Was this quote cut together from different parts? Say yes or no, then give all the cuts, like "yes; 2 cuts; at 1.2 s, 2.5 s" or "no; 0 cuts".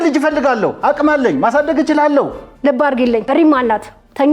yes; 1 cut; at 2.8 s